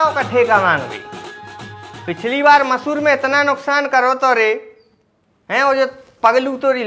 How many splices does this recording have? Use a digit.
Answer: 0